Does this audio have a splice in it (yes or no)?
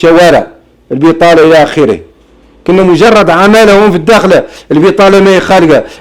no